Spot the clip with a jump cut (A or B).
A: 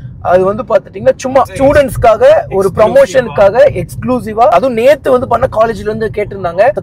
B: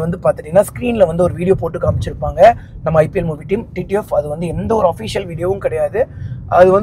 A